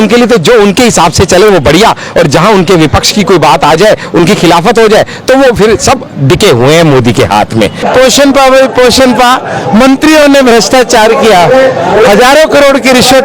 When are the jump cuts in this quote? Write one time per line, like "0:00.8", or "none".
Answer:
0:07.9

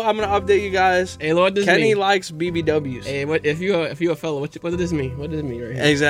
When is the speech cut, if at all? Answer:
none

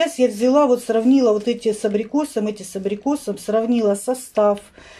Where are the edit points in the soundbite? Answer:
none

